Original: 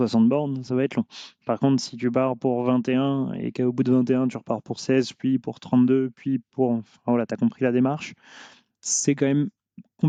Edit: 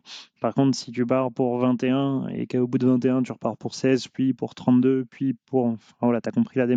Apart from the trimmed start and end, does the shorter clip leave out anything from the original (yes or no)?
no